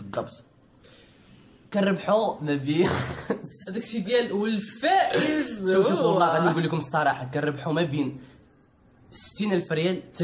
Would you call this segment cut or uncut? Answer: uncut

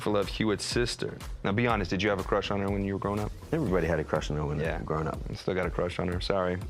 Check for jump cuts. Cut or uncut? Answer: cut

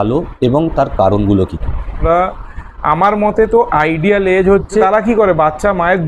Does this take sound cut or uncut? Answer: cut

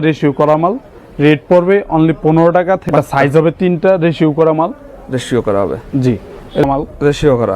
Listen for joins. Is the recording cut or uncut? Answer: cut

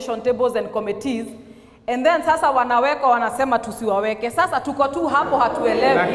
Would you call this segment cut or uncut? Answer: uncut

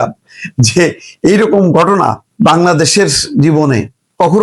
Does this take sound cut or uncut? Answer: cut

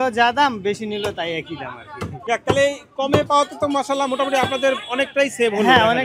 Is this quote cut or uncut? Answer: uncut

